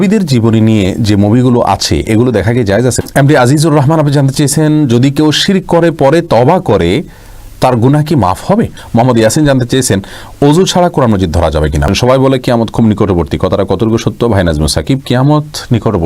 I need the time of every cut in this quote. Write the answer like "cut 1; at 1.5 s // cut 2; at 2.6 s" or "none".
cut 1; at 3.0 s // cut 2; at 8.8 s // cut 3; at 11.9 s